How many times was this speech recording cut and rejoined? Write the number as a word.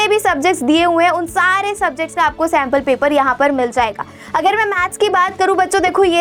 zero